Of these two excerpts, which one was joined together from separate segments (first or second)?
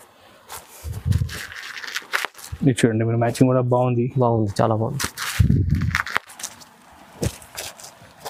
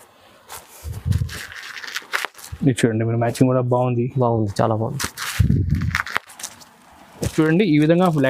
second